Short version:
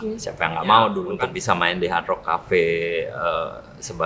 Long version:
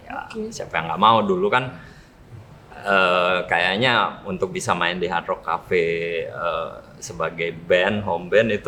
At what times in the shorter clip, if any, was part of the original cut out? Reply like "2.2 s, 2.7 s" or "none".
1.1 s